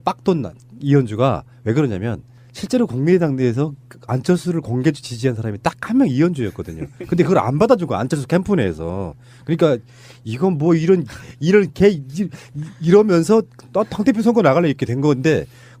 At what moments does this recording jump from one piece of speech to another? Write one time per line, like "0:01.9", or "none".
none